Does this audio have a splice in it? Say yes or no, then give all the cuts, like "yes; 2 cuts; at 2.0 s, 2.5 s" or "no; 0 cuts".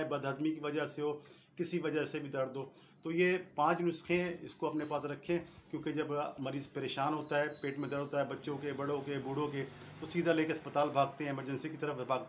no; 0 cuts